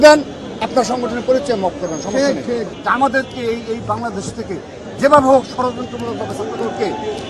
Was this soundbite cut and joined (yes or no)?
yes